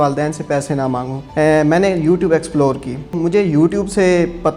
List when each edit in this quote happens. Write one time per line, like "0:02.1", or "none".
0:01.2
0:03.1